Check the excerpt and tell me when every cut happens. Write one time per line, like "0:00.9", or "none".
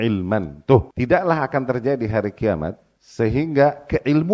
0:00.9